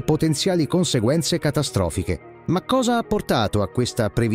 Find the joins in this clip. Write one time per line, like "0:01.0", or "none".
0:02.3